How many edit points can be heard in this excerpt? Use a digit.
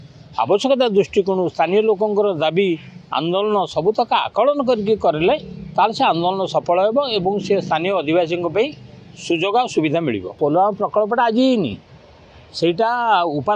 1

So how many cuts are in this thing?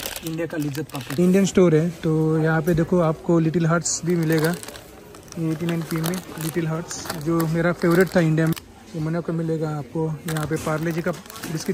2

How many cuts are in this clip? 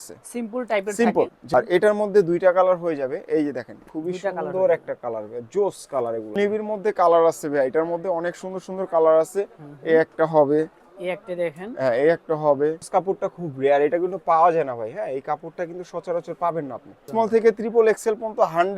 4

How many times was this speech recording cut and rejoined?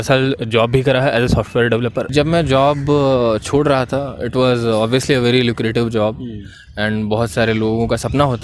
1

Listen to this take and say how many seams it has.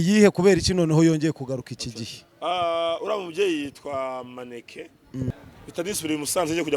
1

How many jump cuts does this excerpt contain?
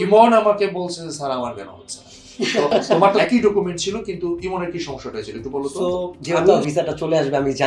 2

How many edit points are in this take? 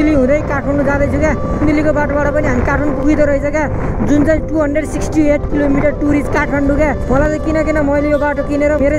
2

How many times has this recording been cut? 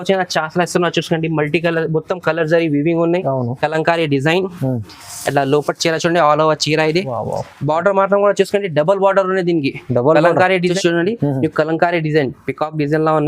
1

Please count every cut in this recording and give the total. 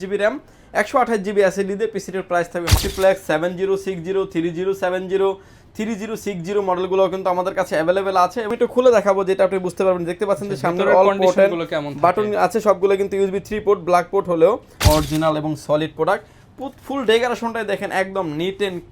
3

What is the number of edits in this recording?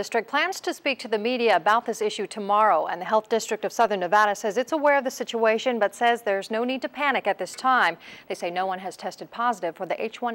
0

